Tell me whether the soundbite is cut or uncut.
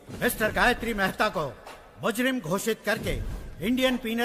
uncut